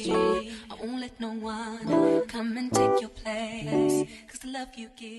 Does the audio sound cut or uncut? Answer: uncut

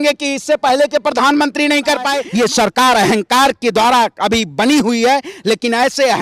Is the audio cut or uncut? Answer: cut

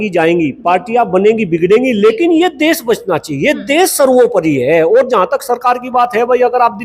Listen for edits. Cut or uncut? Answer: uncut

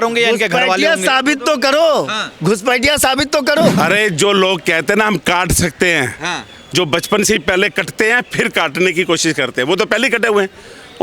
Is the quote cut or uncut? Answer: cut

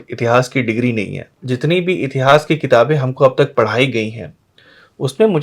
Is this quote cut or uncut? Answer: cut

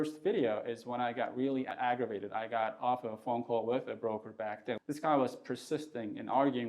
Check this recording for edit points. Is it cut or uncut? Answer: cut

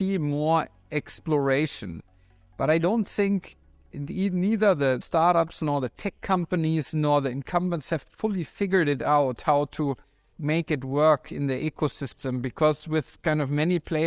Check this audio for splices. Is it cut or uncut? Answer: cut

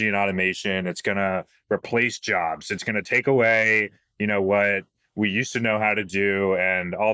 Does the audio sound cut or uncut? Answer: uncut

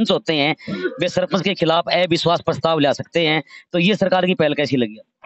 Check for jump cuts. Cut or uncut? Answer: uncut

